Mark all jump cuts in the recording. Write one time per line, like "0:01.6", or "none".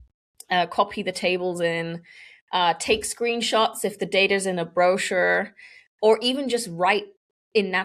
none